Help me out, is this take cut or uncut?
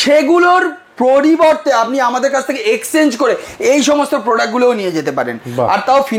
uncut